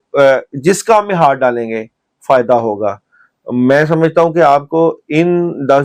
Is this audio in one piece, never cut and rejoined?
yes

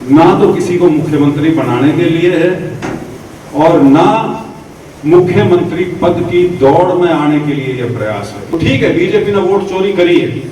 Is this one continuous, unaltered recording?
no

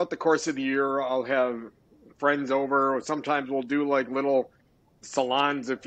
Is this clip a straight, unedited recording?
yes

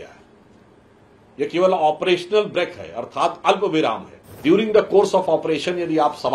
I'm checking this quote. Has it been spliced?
yes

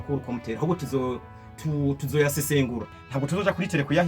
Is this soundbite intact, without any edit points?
no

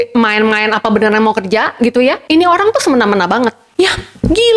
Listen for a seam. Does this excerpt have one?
yes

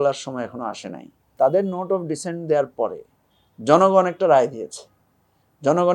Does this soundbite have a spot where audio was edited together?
yes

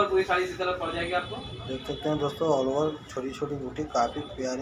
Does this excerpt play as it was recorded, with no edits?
yes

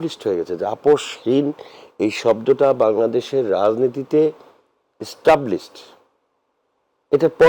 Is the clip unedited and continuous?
yes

